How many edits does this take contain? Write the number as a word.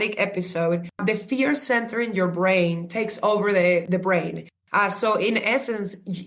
two